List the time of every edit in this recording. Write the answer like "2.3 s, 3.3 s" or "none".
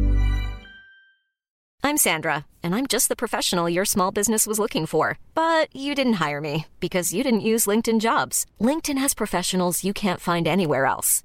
1.6 s